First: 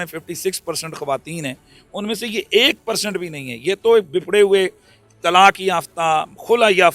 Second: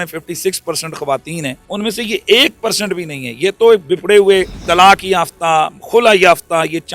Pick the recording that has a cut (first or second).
second